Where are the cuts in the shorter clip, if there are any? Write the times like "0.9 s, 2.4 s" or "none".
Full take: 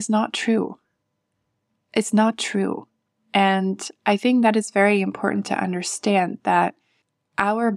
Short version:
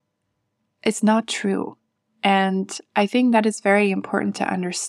none